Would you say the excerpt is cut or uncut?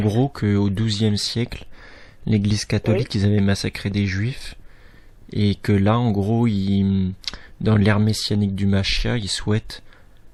uncut